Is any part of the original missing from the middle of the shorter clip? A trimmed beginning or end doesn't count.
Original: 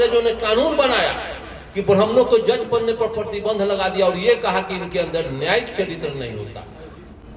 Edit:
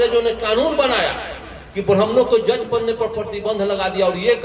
no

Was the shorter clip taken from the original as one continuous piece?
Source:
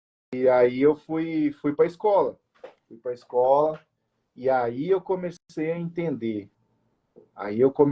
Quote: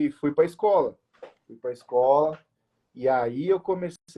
yes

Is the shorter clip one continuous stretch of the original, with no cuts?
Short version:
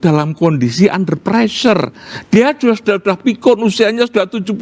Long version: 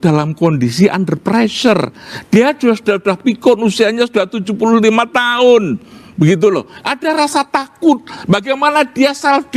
yes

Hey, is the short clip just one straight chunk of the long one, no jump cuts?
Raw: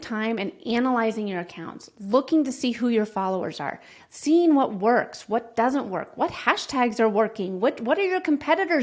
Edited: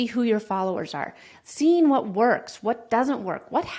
yes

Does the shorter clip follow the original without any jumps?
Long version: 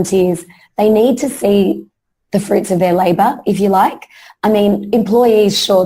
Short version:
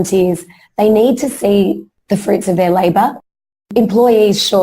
no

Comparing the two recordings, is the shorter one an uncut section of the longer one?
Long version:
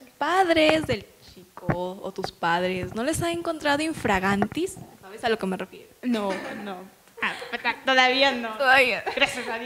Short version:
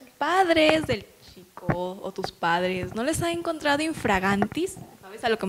yes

